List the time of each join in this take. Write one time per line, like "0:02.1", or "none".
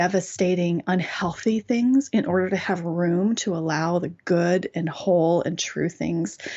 none